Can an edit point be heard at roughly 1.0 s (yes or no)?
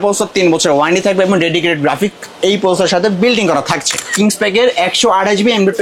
no